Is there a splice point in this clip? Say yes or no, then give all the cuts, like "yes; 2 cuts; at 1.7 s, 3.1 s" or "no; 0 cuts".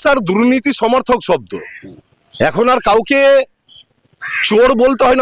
no; 0 cuts